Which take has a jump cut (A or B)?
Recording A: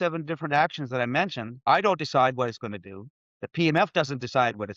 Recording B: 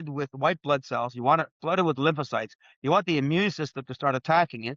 A